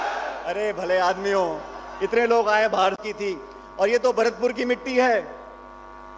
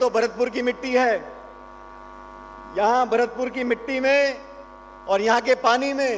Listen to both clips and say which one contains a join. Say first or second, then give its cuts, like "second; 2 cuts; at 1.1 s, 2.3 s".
first; 1 cut; at 3.0 s